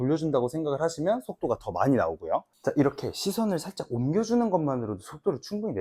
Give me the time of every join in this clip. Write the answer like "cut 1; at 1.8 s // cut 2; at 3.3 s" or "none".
none